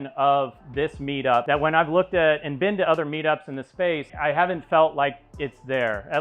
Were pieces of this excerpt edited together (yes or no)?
yes